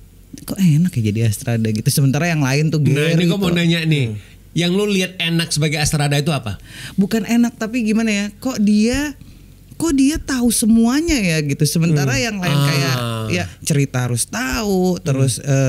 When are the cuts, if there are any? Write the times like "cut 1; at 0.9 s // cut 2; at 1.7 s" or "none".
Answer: cut 1; at 13.5 s